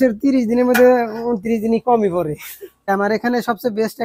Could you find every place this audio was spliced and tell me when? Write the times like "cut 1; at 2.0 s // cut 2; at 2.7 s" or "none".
cut 1; at 2.9 s